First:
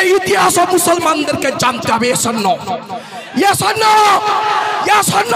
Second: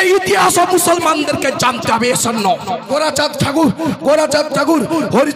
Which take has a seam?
second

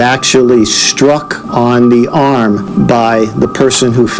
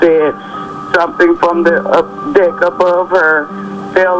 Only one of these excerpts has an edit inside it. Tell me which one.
first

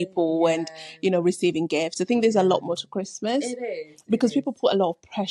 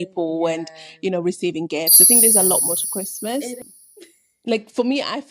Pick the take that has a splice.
second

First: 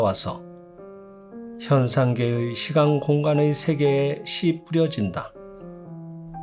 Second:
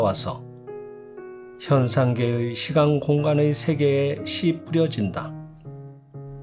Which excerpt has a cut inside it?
first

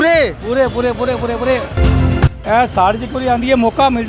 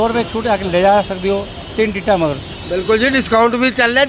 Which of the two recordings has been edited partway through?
first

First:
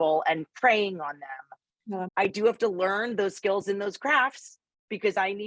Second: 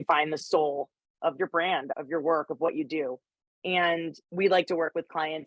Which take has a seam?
first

